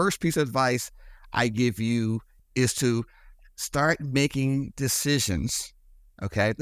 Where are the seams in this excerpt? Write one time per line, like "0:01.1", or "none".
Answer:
0:02.3